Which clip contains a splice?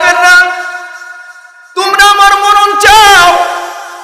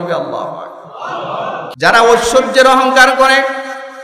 second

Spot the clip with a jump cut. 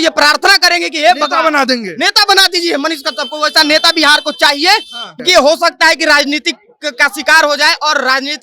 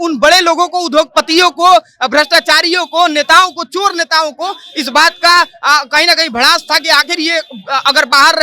first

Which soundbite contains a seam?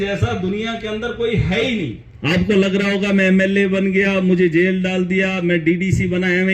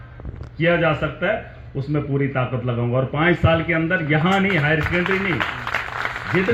first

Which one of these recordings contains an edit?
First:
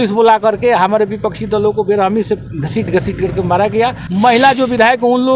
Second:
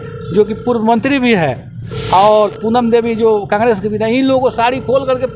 first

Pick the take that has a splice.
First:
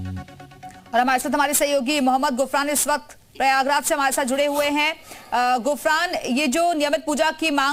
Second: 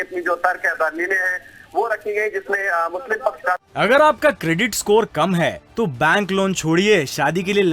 second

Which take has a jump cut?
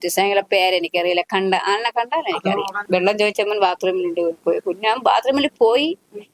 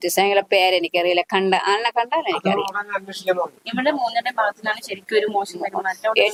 first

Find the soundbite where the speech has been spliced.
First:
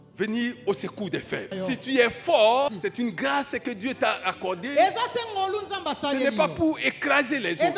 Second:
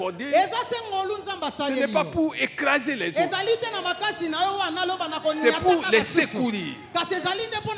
first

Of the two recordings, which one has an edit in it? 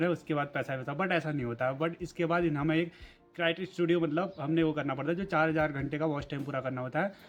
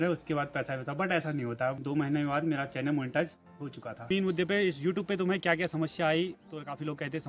second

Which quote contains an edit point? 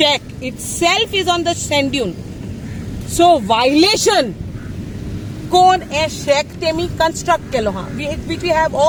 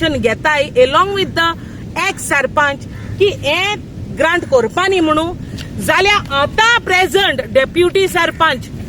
second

